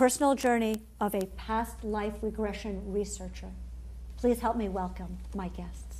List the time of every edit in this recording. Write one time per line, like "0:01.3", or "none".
0:05.0